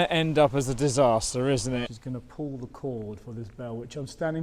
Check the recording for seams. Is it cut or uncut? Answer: cut